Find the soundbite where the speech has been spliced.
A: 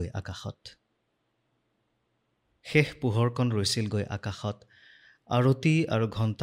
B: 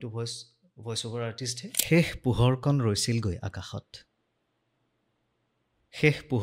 B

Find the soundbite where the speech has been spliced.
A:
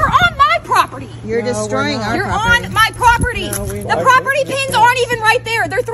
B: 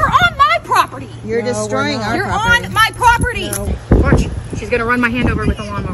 B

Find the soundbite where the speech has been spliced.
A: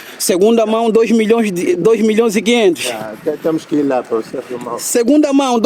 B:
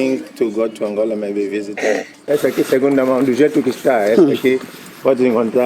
B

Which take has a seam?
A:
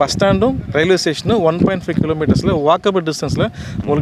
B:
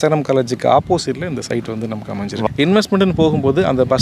B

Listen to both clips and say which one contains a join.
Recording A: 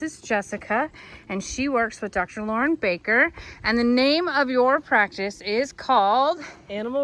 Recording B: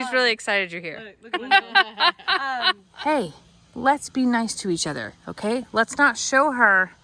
B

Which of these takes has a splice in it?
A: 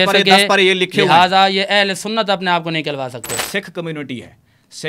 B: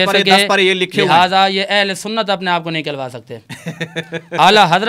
A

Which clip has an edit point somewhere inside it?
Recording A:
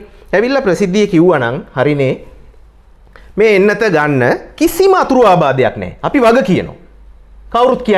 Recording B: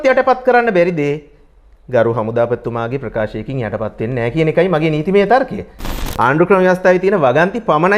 B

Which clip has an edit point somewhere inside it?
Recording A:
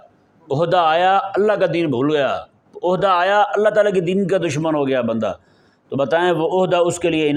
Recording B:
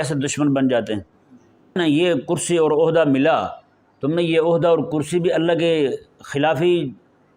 B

